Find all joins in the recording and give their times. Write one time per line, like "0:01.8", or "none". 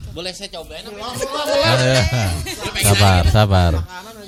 none